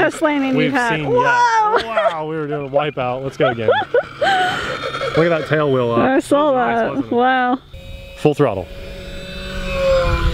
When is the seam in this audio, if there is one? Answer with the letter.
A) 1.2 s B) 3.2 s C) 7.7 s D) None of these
C